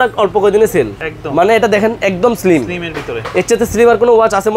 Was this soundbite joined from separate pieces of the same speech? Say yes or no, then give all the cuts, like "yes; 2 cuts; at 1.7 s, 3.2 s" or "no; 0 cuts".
no; 0 cuts